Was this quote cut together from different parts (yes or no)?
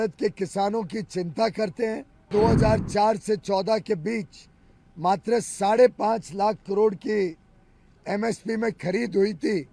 yes